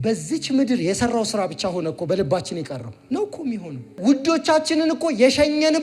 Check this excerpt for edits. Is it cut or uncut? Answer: cut